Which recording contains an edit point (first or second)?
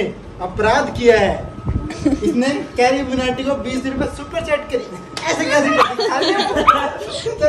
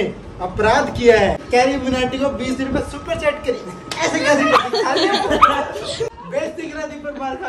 second